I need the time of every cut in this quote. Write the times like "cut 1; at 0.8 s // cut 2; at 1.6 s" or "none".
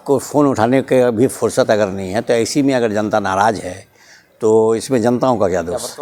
none